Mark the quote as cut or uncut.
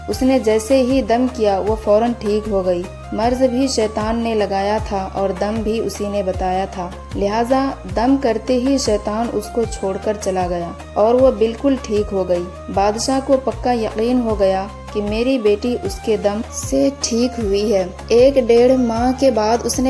uncut